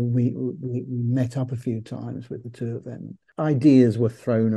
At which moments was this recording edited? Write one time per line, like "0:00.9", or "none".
0:03.2